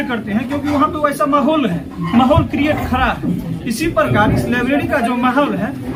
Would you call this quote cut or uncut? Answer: uncut